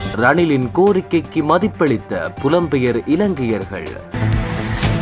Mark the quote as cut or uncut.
cut